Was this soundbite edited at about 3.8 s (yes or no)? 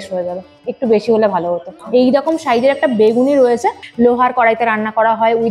yes